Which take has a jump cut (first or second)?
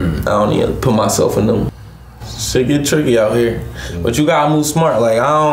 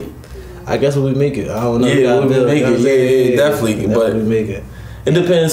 first